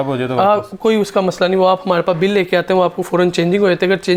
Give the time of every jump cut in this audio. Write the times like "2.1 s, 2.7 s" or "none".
none